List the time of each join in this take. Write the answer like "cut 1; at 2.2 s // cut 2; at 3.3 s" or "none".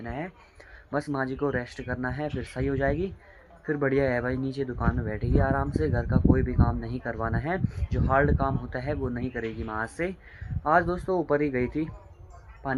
none